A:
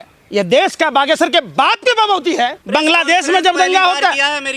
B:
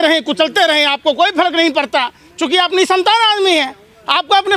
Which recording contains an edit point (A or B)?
A